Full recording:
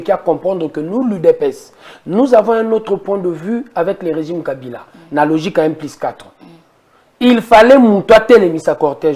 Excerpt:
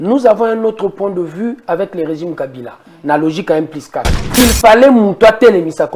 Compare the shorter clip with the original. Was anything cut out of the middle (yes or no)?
yes